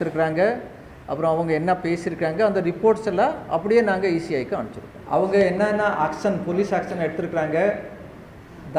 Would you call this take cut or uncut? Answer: cut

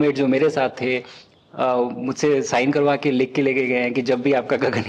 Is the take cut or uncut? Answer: uncut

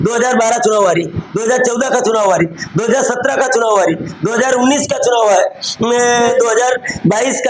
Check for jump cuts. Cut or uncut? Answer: cut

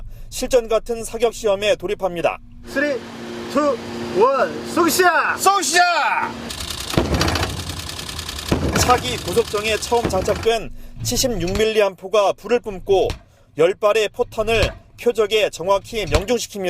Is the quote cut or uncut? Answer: cut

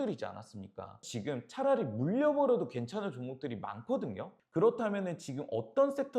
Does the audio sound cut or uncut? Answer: cut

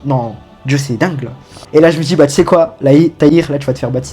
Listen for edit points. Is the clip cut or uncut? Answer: cut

